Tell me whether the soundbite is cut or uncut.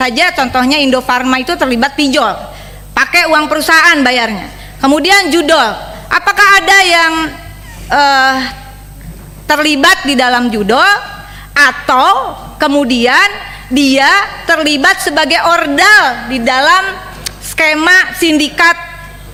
uncut